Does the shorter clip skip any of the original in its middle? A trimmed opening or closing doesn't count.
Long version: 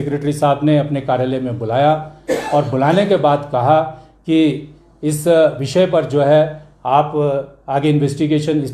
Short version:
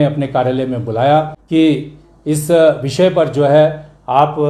yes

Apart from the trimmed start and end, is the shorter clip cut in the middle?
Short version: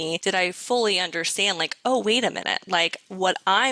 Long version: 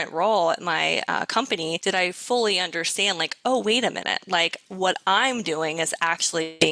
no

